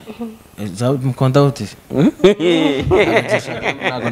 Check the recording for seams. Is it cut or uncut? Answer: uncut